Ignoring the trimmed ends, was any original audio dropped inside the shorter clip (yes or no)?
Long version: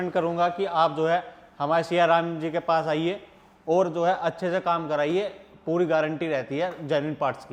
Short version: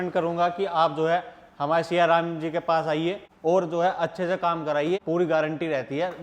yes